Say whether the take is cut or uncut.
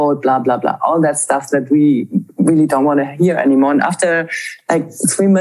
uncut